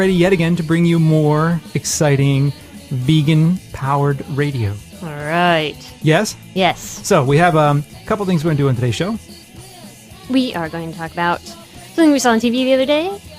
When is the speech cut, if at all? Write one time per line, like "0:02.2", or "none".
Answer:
0:06.3